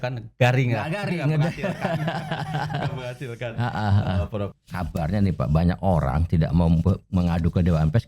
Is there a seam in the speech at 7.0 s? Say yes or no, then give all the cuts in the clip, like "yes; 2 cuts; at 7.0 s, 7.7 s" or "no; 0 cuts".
no; 1 cut; at 4.5 s